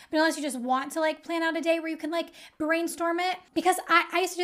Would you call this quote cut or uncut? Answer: cut